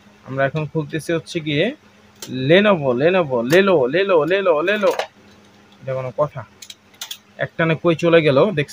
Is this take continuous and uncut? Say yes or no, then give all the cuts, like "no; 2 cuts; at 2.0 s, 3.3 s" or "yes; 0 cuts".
yes; 0 cuts